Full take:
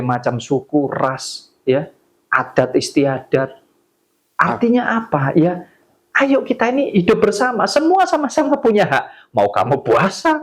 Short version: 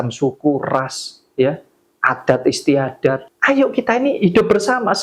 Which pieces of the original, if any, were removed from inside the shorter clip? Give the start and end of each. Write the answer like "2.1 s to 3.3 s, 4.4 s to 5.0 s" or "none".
3.6 s to 6.0 s